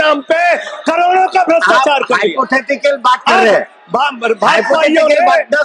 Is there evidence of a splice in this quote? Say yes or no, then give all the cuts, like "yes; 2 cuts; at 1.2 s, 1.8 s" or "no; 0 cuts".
no; 0 cuts